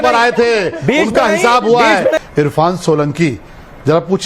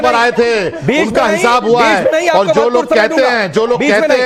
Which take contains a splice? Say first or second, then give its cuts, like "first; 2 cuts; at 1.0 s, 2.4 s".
first; 1 cut; at 2.2 s